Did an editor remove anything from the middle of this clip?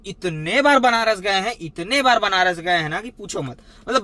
no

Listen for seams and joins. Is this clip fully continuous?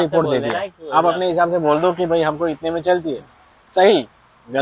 yes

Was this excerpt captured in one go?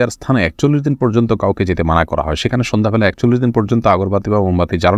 yes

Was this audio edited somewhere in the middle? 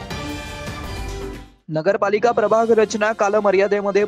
yes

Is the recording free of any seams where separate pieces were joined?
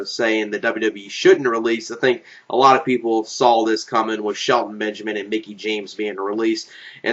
yes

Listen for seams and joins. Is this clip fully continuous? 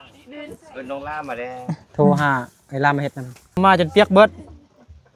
no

